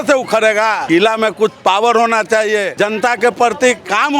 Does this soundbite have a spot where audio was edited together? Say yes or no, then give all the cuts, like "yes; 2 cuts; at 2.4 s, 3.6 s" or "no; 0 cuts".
yes; 2 cuts; at 0.8 s, 2.7 s